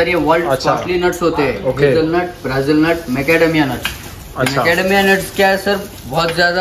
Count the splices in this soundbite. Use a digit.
0